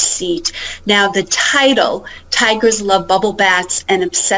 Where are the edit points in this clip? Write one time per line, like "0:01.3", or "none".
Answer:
none